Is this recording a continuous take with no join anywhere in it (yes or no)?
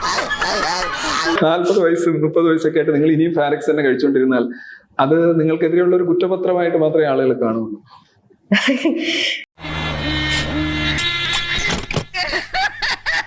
no